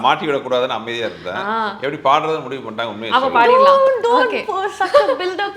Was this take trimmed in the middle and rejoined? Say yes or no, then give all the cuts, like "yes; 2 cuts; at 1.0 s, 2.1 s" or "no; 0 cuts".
no; 0 cuts